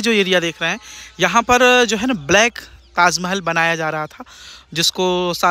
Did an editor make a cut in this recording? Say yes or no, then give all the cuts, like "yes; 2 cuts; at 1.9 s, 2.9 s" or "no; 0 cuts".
no; 0 cuts